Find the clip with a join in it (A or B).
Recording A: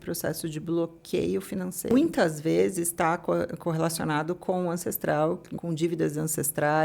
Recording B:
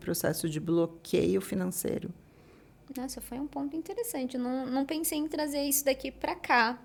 A